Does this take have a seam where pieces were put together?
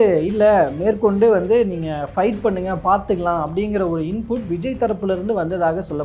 no; 0 cuts

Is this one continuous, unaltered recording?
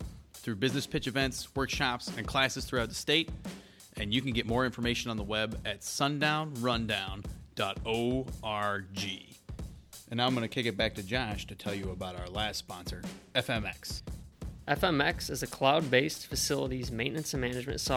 yes; 0 cuts

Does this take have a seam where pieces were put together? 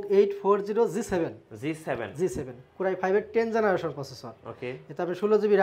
no; 0 cuts

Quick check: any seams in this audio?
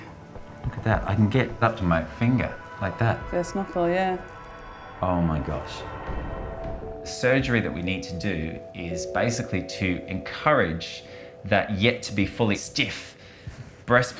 yes; 1 cut; at 6.7 s

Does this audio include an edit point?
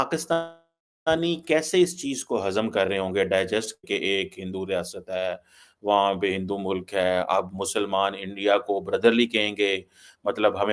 no; 0 cuts

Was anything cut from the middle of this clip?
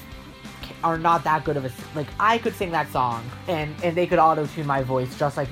yes; 1 cut; at 3.3 s

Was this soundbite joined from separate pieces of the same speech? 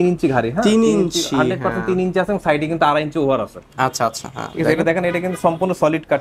no; 0 cuts

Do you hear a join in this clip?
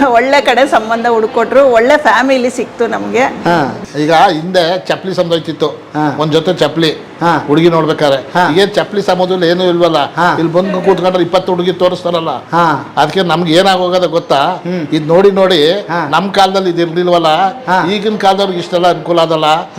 yes; 1 cut; at 3.8 s

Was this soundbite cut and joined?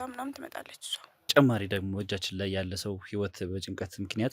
yes; 1 cut; at 1.3 s

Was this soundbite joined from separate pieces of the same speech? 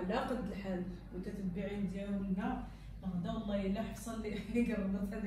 no; 0 cuts

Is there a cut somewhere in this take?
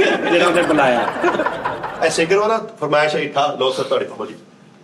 yes; 1 cut; at 1.9 s

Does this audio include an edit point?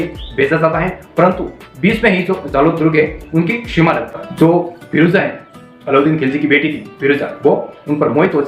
yes; 1 cut; at 4.2 s

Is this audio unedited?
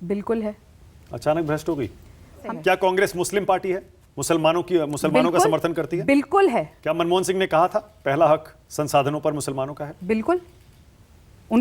no; 2 cuts; at 2.4 s, 6.8 s

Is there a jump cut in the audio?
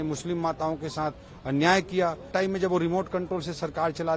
yes; 1 cut; at 2.3 s

